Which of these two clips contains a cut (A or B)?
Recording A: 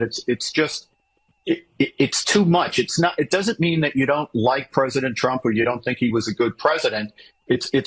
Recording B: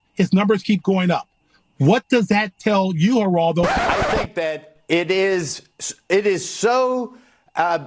B